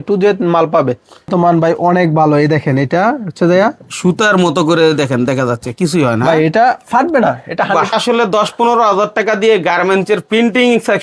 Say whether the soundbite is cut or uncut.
cut